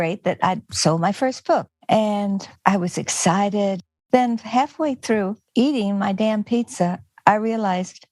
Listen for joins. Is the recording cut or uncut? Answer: cut